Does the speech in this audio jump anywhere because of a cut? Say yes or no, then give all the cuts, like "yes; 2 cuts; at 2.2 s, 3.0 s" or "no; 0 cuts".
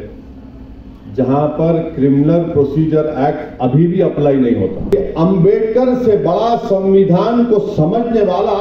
yes; 1 cut; at 4.8 s